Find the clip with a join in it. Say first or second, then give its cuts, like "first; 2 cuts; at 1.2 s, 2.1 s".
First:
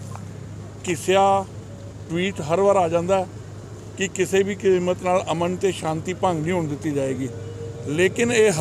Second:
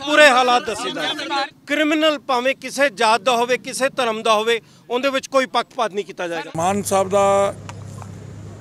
second; 2 cuts; at 1.6 s, 6.5 s